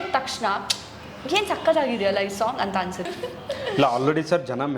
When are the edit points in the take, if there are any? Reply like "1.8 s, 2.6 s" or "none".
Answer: 3.1 s